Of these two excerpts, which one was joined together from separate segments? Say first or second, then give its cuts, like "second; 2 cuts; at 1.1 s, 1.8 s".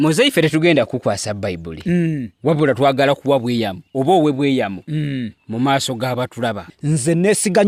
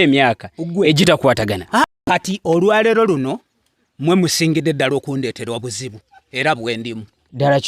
second; 1 cut; at 1.9 s